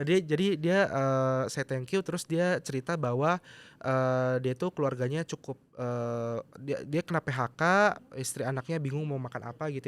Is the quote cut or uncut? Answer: uncut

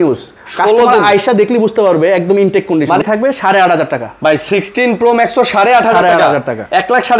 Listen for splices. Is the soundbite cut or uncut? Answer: cut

